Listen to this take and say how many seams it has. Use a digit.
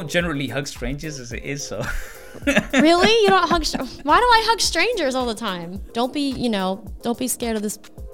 1